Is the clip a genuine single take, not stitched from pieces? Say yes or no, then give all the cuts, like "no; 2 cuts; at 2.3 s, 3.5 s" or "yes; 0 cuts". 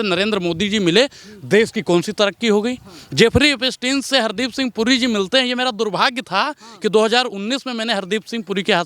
yes; 0 cuts